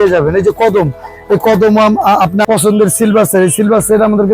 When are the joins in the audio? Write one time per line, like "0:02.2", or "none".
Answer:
0:02.4